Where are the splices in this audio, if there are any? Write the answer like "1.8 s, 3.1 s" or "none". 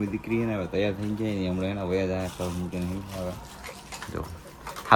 none